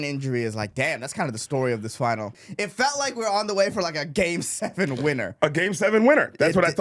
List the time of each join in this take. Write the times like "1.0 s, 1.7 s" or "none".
2.3 s